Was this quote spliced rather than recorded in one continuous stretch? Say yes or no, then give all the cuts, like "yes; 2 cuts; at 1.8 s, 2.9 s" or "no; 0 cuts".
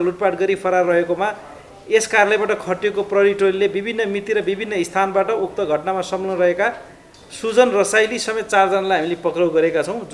no; 0 cuts